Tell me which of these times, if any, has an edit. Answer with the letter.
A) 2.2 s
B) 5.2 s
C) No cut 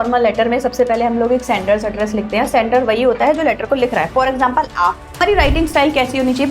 B